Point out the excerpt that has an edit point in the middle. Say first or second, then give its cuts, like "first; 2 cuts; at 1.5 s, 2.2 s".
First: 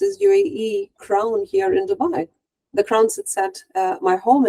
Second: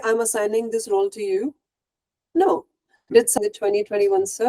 second; 1 cut; at 3.3 s